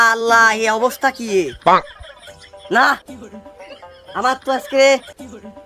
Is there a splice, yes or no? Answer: no